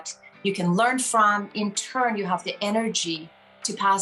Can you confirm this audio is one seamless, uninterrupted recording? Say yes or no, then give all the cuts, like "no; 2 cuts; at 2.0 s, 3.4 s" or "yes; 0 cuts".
no; 1 cut; at 1.5 s